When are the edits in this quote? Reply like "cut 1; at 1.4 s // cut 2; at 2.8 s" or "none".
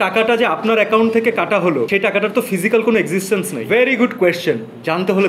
cut 1; at 3.6 s